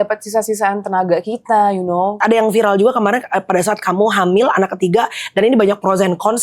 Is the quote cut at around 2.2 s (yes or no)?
yes